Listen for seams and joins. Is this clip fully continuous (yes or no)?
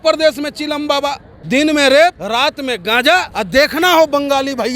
no